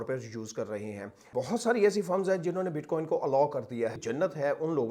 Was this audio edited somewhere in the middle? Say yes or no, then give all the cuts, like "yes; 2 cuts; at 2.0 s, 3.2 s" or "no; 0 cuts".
yes; 2 cuts; at 1.3 s, 4.0 s